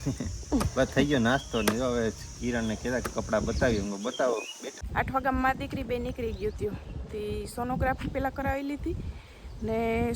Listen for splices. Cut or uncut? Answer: cut